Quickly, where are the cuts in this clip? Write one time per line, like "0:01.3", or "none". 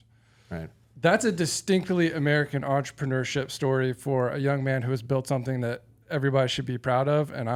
none